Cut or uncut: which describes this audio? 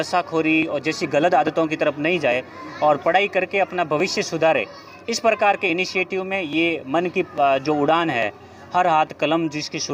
uncut